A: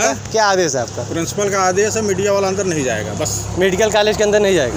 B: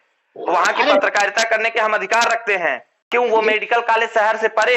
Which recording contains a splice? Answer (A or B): B